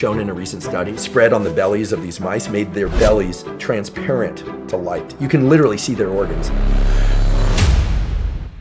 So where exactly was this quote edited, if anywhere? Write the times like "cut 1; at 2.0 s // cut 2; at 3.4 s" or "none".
cut 1; at 0.9 s